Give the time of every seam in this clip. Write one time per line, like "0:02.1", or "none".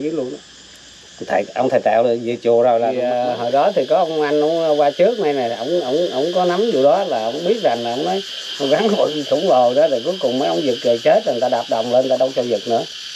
0:03.0